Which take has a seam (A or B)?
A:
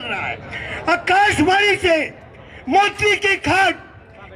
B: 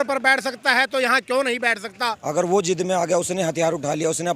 B